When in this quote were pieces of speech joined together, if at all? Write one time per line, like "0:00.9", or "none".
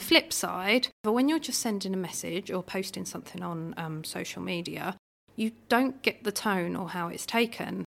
0:01.0